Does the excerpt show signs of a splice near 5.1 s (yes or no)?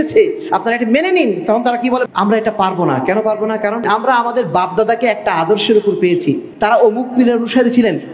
no